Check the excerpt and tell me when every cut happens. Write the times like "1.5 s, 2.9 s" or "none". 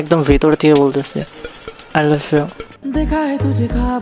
2.8 s